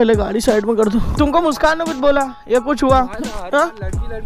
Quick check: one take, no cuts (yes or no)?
no